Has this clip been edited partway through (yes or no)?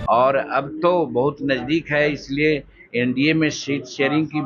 no